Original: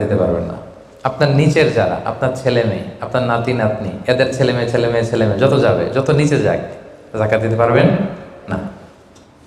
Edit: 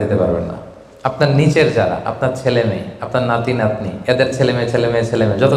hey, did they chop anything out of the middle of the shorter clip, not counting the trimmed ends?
no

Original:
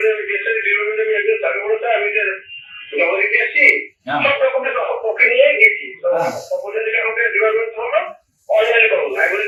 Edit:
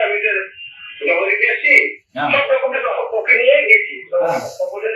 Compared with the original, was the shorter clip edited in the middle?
no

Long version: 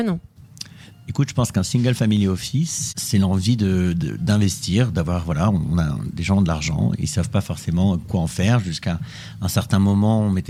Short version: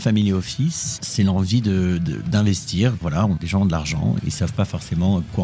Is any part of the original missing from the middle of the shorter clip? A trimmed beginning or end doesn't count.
yes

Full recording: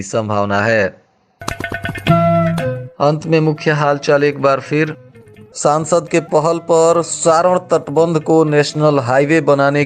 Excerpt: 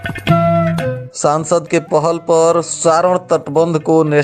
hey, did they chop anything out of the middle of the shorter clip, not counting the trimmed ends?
yes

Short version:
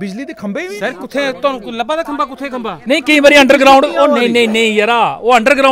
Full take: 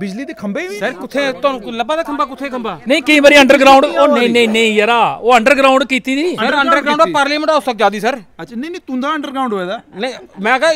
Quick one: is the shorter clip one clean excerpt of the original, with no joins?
yes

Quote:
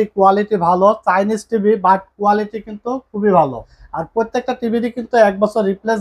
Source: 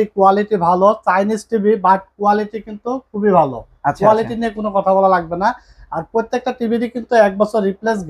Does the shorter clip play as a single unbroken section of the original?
no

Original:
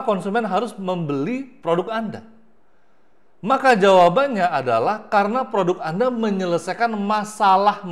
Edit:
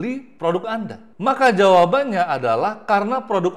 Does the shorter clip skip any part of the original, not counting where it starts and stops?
yes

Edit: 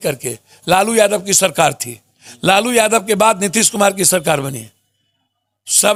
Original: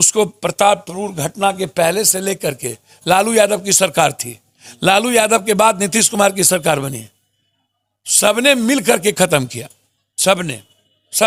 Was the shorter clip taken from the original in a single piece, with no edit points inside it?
yes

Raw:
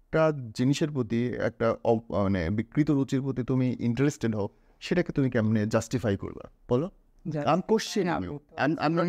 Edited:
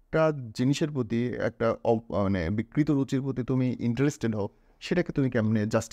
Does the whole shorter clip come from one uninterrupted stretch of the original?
yes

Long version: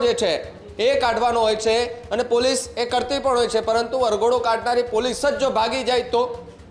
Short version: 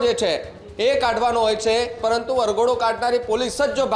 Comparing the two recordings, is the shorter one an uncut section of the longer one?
no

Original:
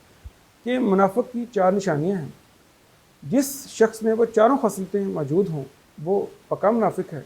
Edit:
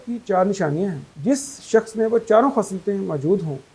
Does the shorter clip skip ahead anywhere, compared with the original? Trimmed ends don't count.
yes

